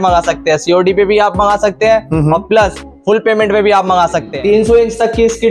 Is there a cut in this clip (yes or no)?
yes